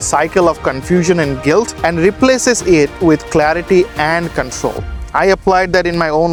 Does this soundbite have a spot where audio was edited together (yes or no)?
no